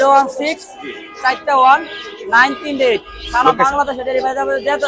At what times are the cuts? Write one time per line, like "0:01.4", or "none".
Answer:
none